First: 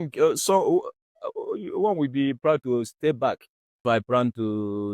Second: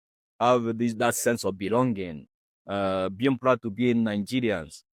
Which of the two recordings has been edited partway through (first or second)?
first